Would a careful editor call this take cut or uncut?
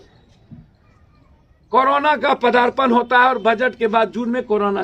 uncut